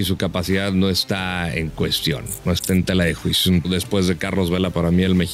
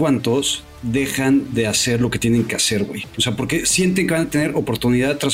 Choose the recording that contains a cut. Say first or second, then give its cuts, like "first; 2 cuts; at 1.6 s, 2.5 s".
first; 1 cut; at 3.7 s